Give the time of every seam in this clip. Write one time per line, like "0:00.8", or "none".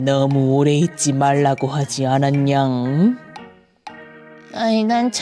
0:03.3
0:04.5